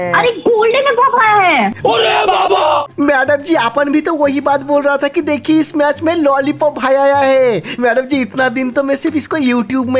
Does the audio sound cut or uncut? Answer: uncut